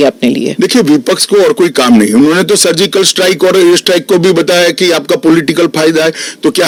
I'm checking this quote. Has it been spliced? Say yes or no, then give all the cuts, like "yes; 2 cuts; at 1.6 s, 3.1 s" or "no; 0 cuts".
no; 0 cuts